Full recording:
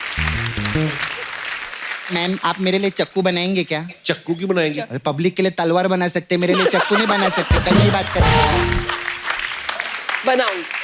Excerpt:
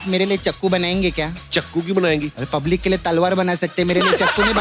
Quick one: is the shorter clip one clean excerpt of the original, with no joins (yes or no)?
yes